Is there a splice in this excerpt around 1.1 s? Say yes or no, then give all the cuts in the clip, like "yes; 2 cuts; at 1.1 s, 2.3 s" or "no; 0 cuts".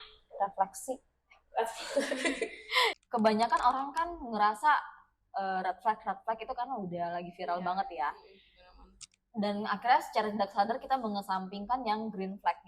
no; 1 cut; at 2.9 s